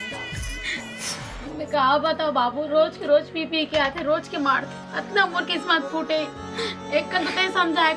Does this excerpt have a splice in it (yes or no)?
no